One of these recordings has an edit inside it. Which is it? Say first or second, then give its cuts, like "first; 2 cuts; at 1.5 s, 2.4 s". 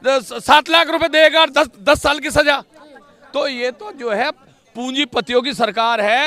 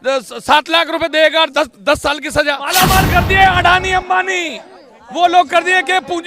second; 1 cut; at 2.7 s